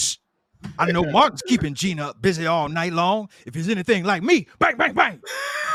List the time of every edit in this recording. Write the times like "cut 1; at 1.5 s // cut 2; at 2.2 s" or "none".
none